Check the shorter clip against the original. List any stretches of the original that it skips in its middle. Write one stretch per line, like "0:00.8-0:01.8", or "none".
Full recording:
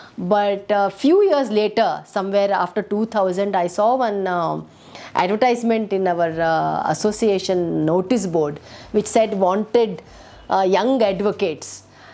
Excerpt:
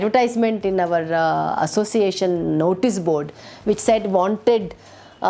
none

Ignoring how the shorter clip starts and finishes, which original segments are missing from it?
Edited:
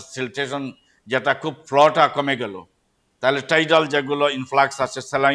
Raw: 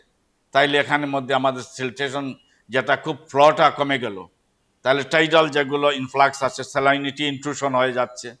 none

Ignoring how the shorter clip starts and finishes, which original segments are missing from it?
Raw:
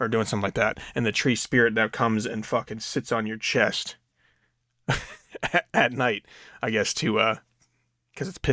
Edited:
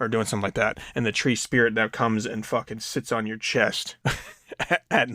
0:03.9-0:04.7

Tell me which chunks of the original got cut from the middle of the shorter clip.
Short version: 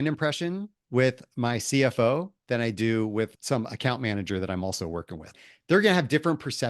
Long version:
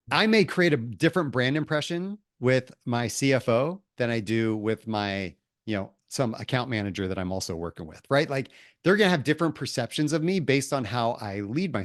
0:04.8-0:06.0
0:08.0-0:08.5

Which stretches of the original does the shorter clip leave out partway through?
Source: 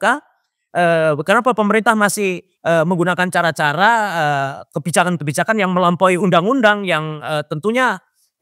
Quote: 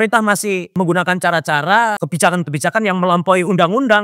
0:02.5-0:02.9
0:04.1-0:04.7

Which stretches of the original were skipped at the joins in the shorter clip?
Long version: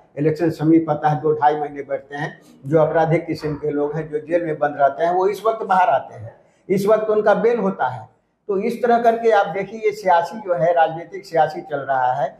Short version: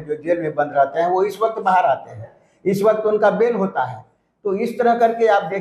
none

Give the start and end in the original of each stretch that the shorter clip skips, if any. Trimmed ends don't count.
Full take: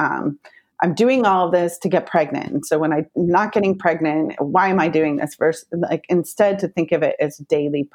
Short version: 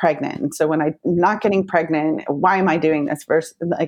none

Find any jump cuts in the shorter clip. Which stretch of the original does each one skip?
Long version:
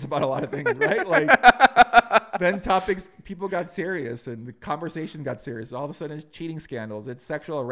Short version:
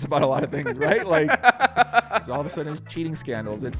0:02.3-0:05.7

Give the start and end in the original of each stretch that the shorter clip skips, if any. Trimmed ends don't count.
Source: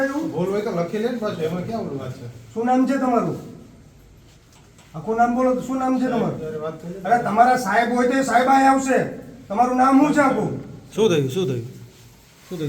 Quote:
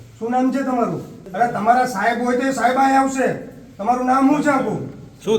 0:03.5-0:06.9

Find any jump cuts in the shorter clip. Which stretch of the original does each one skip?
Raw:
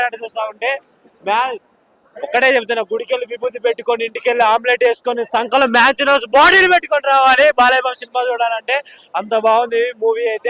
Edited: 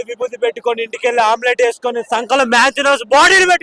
none

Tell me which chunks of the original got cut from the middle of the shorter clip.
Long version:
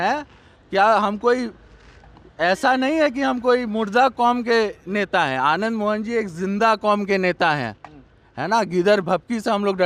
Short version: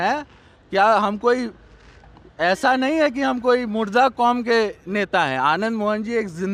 none

